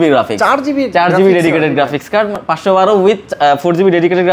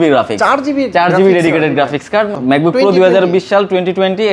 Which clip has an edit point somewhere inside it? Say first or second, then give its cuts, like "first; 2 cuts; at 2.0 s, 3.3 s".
second; 1 cut; at 2.4 s